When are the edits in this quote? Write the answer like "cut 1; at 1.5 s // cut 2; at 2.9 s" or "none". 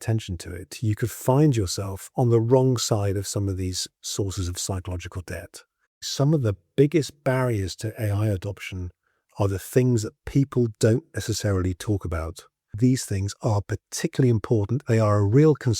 cut 1; at 6.1 s // cut 2; at 12.7 s

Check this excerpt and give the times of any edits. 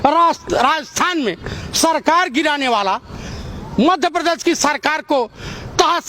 none

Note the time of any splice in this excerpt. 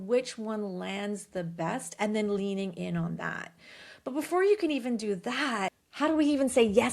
cut 1; at 5.8 s

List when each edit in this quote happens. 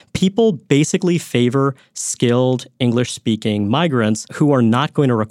cut 1; at 4.3 s

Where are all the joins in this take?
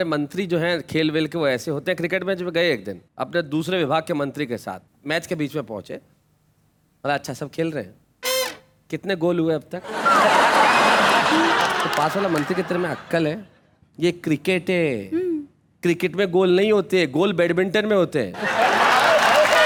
none

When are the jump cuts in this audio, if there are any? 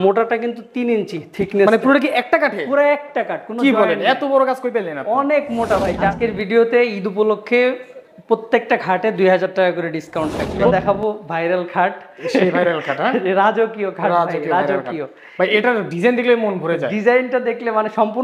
cut 1; at 6.1 s // cut 2; at 10.7 s

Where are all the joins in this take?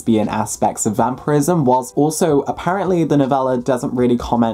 none

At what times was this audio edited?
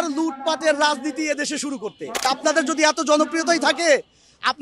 cut 1; at 2.3 s

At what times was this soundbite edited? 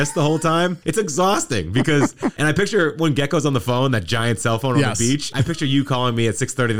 cut 1; at 2.4 s // cut 2; at 5.3 s

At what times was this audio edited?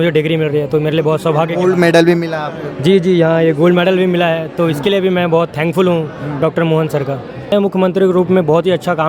cut 1; at 7.5 s

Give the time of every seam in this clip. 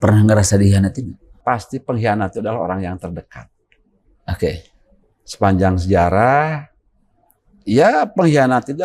cut 1; at 1.4 s

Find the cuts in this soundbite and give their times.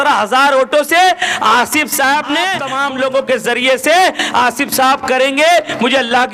cut 1; at 2.7 s

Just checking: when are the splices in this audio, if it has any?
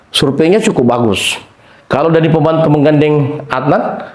none

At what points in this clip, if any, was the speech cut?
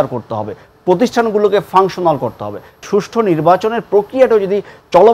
cut 1; at 2.8 s

